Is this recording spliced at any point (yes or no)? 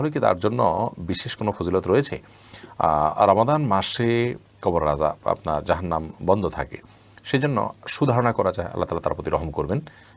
no